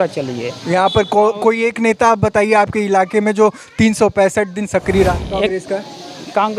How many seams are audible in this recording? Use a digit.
1